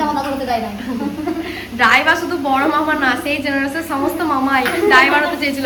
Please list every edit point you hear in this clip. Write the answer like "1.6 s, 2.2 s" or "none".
none